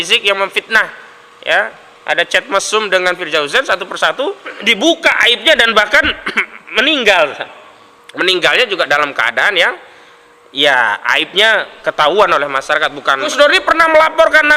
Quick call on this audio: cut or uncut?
cut